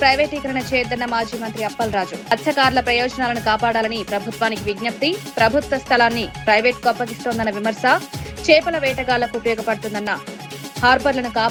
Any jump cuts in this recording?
no; 0 cuts

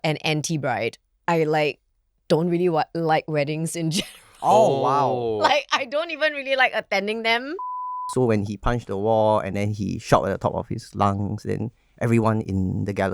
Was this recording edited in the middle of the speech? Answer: yes; 2 cuts; at 1.1 s, 7.6 s

